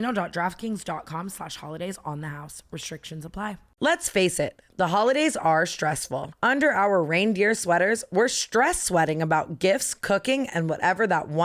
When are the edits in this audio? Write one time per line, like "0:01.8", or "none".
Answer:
0:03.7